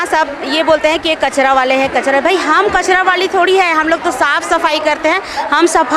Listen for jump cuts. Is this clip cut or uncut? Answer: uncut